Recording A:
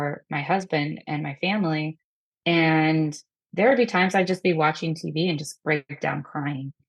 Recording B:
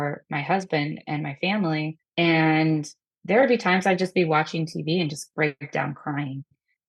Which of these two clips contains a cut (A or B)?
B